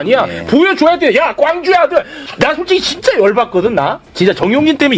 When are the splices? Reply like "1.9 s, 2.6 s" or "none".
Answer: none

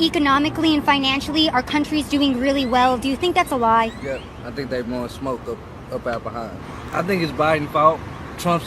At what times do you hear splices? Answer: 2.3 s

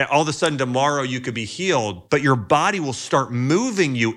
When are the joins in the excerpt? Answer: 2.0 s

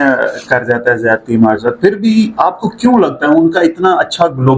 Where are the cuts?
none

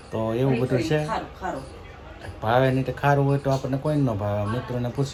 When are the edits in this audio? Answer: none

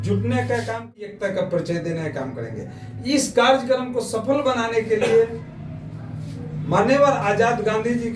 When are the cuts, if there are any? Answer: 0.9 s

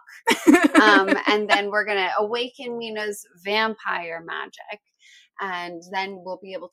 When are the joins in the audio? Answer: none

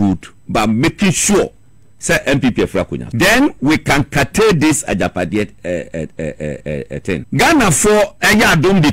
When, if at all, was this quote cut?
3.0 s, 7.2 s

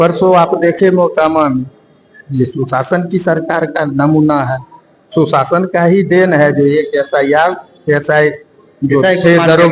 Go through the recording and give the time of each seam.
none

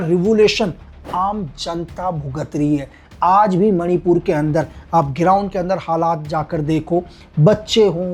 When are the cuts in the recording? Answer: none

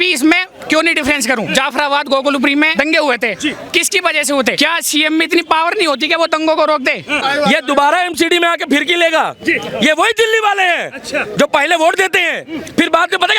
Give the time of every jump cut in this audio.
1.5 s, 2.7 s, 4.5 s, 7.2 s

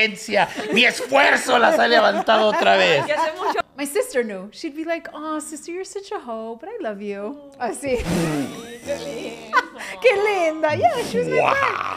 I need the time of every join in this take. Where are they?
3.7 s

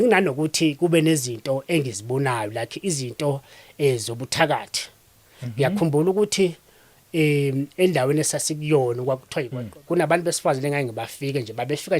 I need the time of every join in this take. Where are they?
9.6 s

